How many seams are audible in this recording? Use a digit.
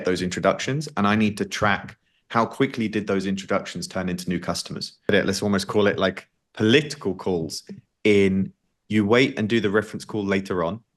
1